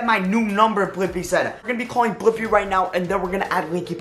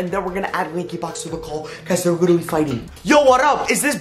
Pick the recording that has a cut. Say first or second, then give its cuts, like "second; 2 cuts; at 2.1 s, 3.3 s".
first; 1 cut; at 1.6 s